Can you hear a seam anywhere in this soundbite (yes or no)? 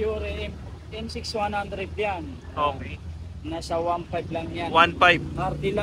no